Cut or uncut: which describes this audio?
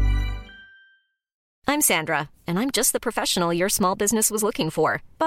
cut